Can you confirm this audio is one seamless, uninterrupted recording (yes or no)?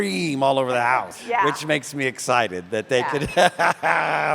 no